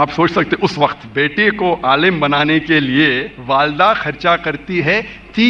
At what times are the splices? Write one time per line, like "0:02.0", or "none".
0:01.0
0:03.3